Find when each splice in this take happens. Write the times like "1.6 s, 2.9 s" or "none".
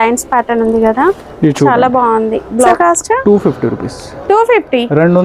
2.7 s